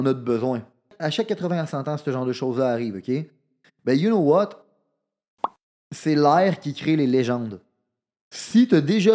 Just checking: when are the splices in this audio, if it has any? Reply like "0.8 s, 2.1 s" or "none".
0.9 s